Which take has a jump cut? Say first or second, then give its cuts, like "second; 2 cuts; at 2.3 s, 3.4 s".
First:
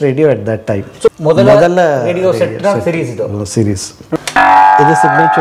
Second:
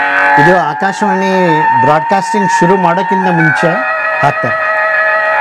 first; 2 cuts; at 1.1 s, 4.0 s